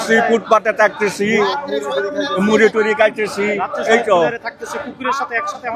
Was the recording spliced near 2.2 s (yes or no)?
no